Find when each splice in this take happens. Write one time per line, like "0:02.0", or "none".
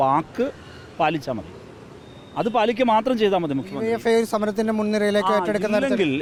none